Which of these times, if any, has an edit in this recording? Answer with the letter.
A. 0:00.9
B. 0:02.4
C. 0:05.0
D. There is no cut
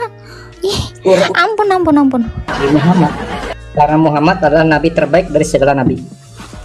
B